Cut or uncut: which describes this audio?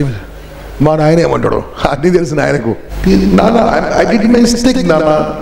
cut